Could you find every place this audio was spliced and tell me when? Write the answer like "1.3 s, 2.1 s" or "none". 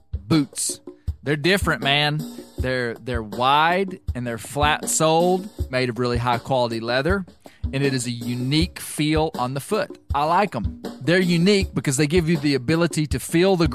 5.6 s